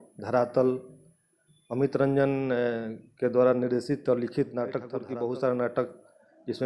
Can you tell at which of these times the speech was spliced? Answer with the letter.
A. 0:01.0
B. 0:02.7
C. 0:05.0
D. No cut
C